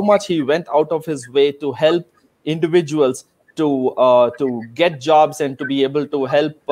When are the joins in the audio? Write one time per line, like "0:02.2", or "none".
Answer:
none

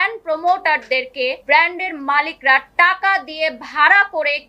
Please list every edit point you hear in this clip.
0:01.4

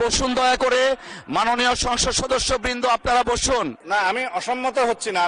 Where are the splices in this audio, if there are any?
0:03.8

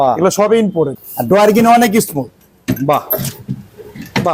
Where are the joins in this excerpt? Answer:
0:01.0

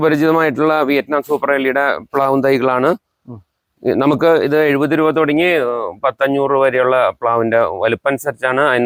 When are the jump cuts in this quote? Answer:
none

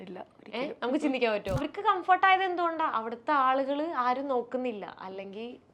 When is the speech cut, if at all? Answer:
0:01.6

